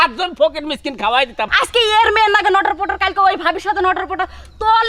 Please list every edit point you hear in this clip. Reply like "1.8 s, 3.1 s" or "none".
1.5 s

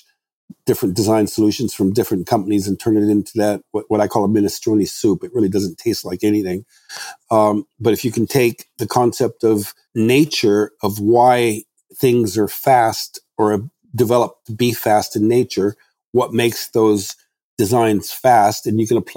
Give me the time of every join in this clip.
9.8 s

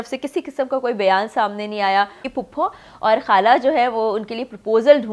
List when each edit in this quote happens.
2.3 s

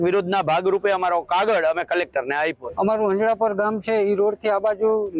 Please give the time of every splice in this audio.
2.6 s

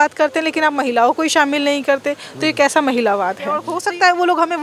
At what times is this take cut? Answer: 3.7 s

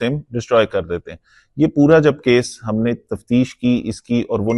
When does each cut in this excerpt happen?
none

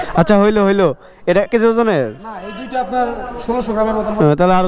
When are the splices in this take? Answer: 1.5 s

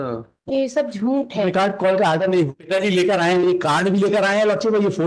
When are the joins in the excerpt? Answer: 2.5 s

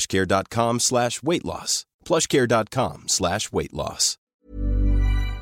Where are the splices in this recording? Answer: 4.4 s

